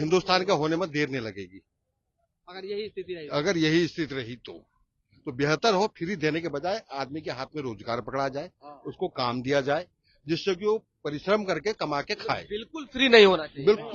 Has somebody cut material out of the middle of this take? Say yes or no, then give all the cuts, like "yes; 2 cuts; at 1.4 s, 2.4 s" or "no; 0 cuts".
no; 0 cuts